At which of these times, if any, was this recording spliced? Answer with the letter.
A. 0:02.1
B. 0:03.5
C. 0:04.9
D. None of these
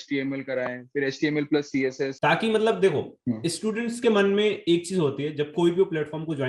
A